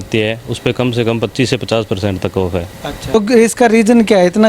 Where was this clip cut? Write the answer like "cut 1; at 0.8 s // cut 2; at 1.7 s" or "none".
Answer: cut 1; at 3.1 s